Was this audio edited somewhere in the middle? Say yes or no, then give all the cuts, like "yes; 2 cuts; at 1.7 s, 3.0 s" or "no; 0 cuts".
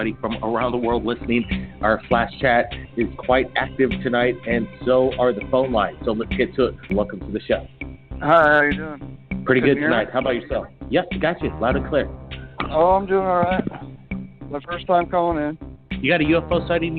yes; 1 cut; at 9.5 s